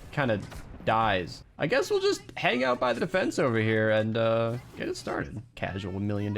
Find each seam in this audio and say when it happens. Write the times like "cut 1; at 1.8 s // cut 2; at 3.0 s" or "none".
cut 1; at 1.4 s